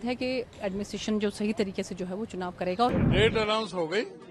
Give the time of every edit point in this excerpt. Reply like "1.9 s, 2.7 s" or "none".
2.9 s